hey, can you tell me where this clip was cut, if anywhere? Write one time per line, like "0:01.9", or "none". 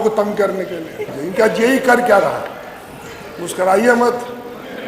0:01.1